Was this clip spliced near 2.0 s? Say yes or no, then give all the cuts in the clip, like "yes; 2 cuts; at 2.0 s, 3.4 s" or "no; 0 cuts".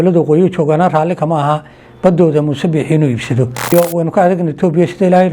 no; 1 cut; at 3.7 s